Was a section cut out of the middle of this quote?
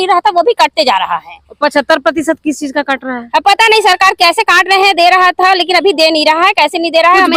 no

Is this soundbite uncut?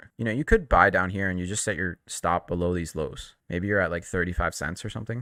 yes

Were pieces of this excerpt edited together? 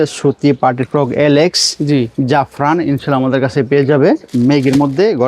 yes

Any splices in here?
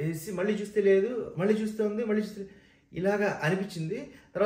no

